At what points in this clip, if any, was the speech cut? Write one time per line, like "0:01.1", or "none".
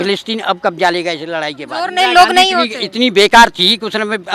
0:01.9